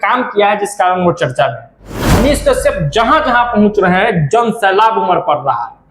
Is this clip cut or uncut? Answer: cut